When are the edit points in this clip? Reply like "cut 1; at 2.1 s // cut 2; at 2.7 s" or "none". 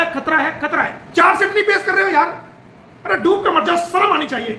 cut 1; at 1.0 s

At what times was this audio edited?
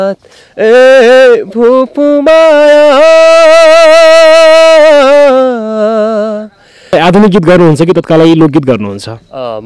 cut 1; at 6.9 s

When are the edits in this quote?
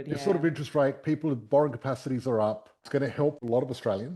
cut 1; at 3.2 s

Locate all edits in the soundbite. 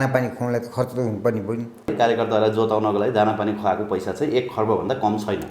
cut 1; at 1.9 s

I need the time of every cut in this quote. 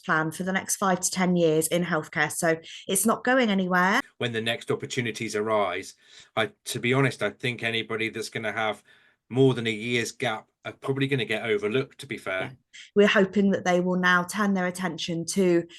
cut 1; at 4.2 s // cut 2; at 12.7 s

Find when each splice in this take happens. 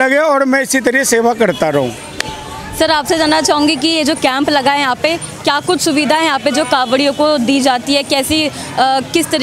none

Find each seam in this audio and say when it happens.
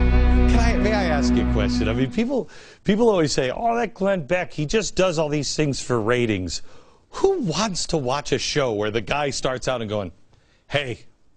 cut 1; at 1.0 s

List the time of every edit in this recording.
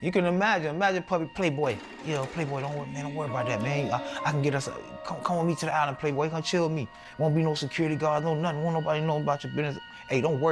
none

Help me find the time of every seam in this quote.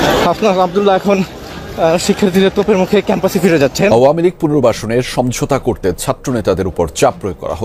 cut 1; at 3.9 s

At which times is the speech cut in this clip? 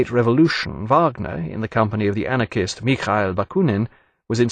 none

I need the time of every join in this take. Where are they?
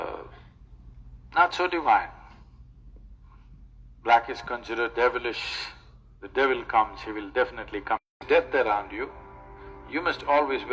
cut 1; at 8.2 s

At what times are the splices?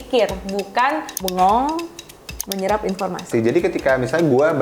cut 1; at 1.2 s // cut 2; at 3.3 s

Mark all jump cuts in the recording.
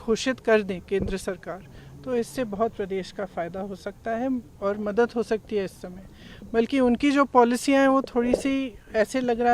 none

